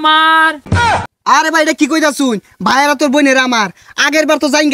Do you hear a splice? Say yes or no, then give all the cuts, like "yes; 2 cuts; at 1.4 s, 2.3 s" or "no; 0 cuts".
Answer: yes; 1 cut; at 1.0 s